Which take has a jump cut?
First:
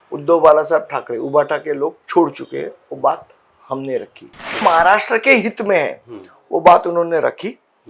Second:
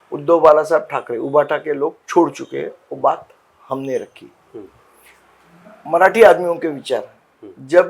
first; 1 cut; at 4.6 s

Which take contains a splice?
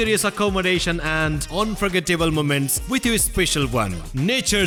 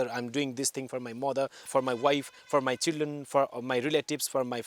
second; 1 cut; at 1.7 s

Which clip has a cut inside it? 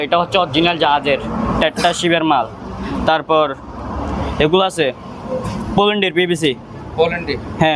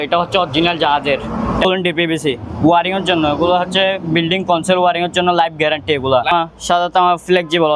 second; 2 cuts; at 1.6 s, 6.3 s

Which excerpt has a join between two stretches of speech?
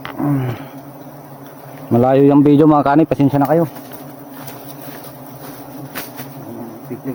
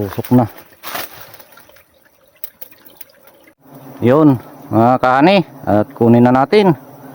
second; 1 cut; at 3.6 s

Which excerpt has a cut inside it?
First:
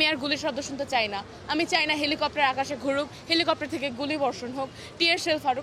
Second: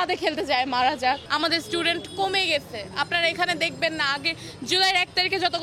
second; 1 cut; at 1.3 s

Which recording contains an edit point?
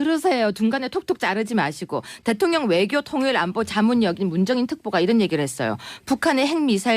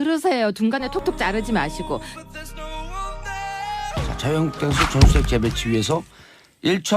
second; 1 cut; at 1.0 s

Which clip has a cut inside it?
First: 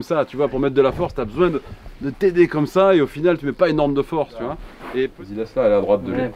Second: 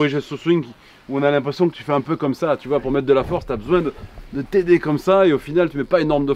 first; 1 cut; at 5.1 s

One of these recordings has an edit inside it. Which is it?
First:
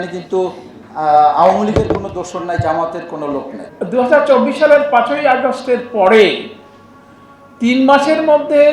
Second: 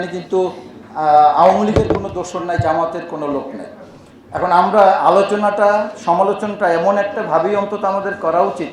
first; 1 cut; at 3.6 s

